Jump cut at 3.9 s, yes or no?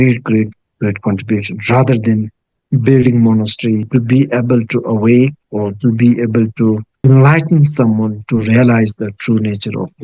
yes